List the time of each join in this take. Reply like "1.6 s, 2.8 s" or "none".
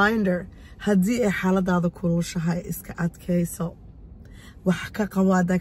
none